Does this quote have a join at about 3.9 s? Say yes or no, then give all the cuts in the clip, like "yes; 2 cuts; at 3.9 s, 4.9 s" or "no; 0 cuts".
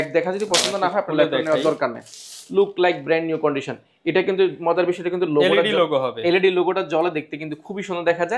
no; 0 cuts